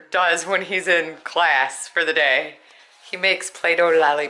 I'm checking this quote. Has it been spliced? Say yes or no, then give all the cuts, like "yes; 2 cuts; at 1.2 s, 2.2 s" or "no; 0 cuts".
no; 0 cuts